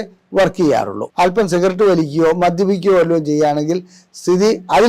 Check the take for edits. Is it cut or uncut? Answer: cut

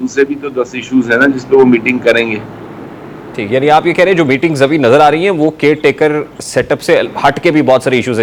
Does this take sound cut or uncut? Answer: uncut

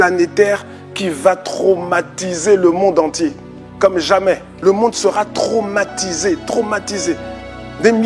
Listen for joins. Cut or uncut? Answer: cut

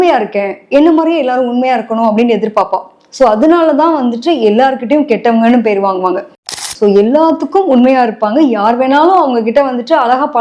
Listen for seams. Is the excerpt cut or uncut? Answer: cut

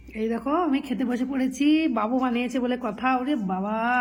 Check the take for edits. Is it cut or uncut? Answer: uncut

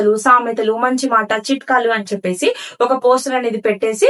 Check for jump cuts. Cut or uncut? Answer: uncut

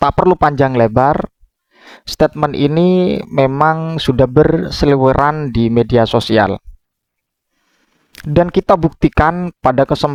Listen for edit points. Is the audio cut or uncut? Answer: uncut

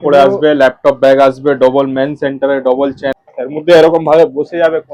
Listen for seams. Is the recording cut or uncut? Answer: cut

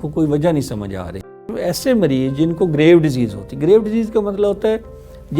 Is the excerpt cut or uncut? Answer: cut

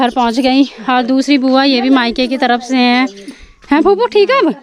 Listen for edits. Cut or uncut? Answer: uncut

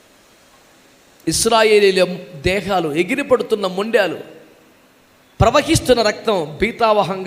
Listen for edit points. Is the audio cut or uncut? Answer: uncut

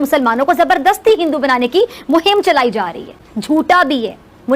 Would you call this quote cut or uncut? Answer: cut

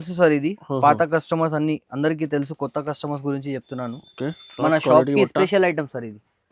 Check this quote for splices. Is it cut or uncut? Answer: uncut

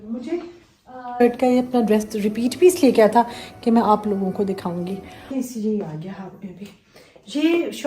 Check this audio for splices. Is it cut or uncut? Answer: cut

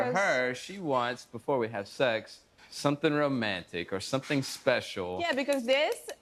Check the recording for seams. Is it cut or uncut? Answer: uncut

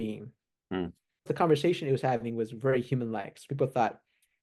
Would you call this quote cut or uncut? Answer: cut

